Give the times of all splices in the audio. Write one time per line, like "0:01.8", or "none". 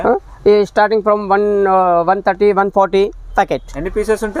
none

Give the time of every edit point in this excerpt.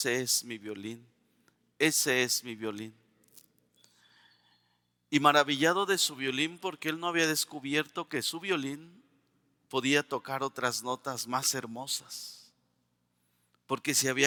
none

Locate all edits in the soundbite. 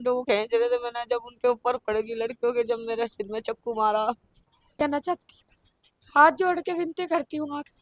0:04.7

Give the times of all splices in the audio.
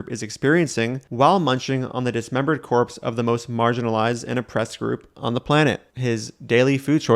0:01.0
0:05.9

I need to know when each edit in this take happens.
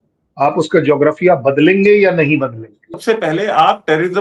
0:03.0

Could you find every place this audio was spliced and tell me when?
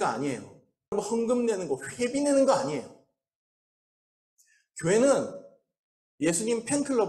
0:00.9

